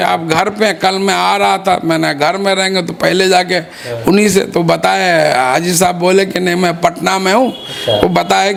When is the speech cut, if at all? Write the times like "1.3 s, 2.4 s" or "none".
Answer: none